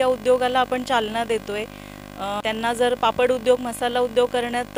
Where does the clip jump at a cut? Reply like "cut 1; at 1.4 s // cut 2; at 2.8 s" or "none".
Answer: cut 1; at 2.4 s